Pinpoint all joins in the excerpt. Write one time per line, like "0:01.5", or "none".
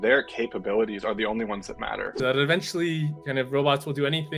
0:02.1